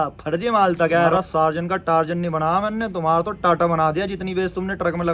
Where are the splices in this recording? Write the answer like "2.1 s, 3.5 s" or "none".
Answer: 1.1 s